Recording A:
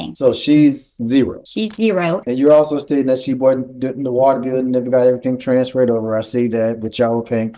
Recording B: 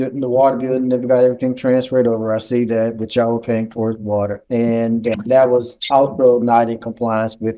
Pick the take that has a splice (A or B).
A